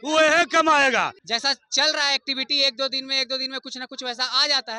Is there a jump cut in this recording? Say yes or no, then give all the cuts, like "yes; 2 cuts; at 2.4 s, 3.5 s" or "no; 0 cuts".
yes; 1 cut; at 1.2 s